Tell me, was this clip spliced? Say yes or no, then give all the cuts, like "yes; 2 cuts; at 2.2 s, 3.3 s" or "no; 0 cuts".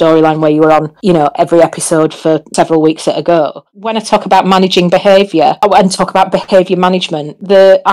yes; 1 cut; at 3.7 s